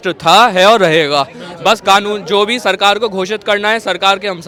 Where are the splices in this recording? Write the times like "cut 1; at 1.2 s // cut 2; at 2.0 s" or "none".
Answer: none